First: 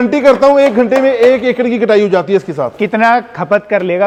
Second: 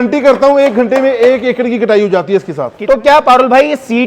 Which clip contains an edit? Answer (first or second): second